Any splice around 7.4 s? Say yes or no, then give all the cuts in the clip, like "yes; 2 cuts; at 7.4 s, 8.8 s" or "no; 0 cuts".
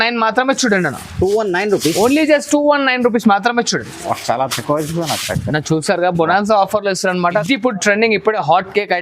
yes; 1 cut; at 7.4 s